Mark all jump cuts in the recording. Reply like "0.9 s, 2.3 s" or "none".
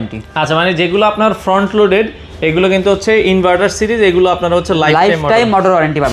none